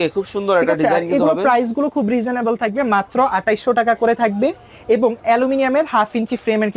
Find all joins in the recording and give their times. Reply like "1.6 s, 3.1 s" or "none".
none